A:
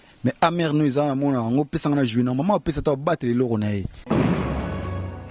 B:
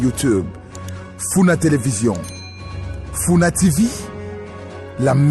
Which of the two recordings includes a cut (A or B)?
A